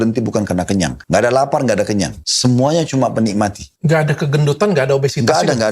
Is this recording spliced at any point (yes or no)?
yes